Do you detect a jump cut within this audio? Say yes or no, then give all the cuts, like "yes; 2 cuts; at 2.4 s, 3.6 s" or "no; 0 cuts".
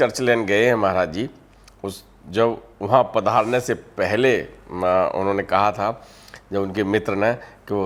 no; 0 cuts